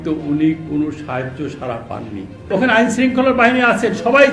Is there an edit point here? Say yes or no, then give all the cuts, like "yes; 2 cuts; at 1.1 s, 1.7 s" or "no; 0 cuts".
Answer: yes; 1 cut; at 2.5 s